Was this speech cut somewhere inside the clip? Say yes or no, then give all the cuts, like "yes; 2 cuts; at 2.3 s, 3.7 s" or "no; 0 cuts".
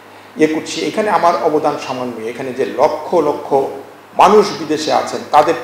no; 0 cuts